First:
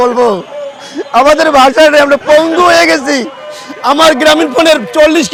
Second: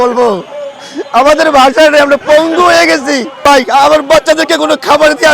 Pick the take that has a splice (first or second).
second